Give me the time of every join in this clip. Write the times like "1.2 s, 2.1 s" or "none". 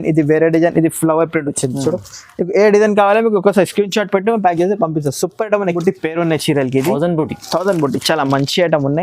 5.7 s